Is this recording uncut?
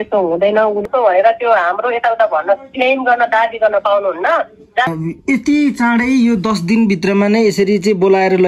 no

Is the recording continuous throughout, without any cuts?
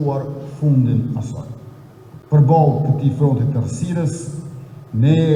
yes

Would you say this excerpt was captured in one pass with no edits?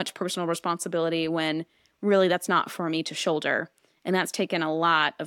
yes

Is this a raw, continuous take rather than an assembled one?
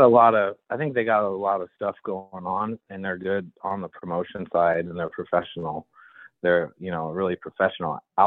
yes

